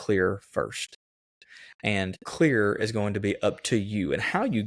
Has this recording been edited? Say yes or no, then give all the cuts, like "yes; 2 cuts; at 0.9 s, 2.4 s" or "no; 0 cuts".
yes; 1 cut; at 2.2 s